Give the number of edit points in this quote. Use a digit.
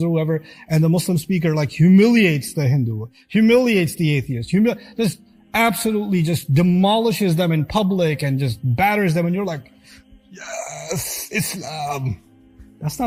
0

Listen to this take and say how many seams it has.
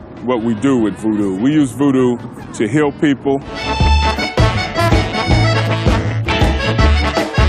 1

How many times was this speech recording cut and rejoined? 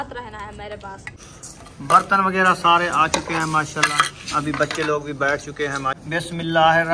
2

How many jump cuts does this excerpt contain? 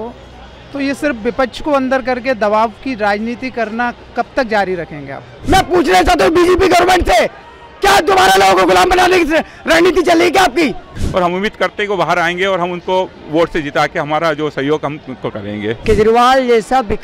3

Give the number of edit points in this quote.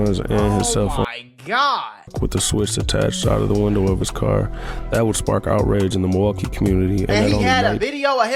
1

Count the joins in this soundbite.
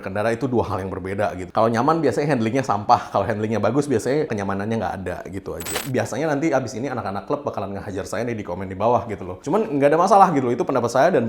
3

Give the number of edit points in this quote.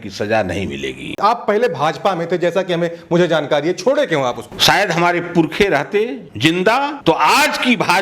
2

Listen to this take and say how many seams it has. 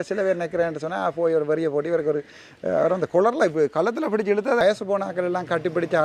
1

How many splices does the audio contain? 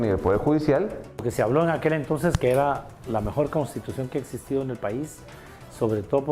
1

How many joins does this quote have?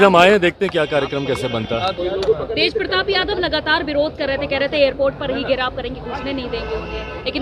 1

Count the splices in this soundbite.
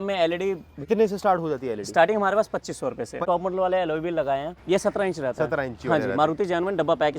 3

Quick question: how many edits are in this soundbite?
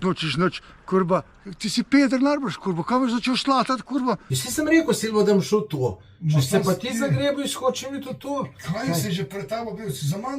1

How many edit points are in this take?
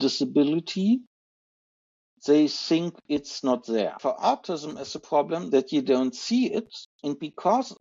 3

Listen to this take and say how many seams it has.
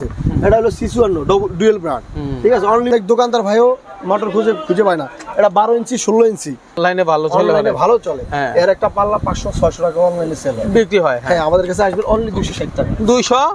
2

